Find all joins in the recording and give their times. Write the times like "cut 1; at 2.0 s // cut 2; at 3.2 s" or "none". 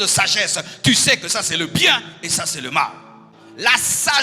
none